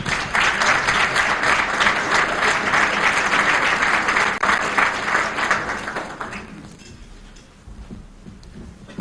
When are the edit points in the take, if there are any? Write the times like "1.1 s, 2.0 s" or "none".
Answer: 8.0 s